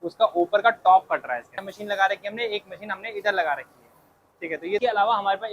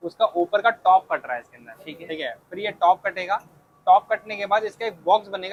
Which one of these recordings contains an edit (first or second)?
first